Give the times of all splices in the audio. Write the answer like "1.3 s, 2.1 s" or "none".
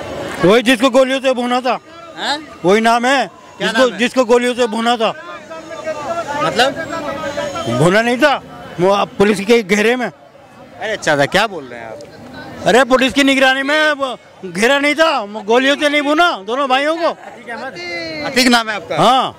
none